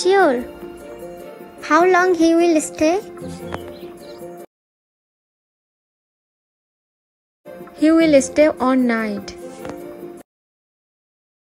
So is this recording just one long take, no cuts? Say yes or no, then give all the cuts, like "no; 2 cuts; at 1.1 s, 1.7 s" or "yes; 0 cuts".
yes; 0 cuts